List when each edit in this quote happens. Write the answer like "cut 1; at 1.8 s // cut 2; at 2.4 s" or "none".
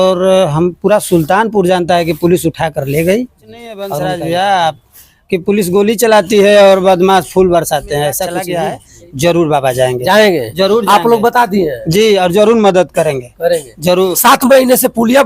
cut 1; at 3.9 s // cut 2; at 8.5 s